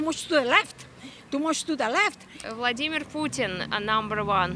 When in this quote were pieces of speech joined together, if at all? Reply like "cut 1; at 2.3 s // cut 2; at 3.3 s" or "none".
none